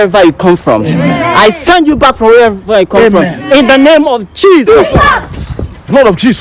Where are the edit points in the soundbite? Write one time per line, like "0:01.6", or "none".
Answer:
0:04.7